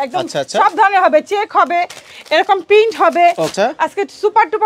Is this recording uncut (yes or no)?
no